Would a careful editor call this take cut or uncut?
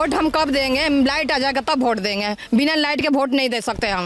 uncut